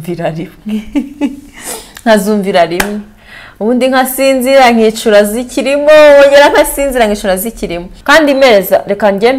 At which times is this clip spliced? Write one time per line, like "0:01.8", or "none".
0:07.9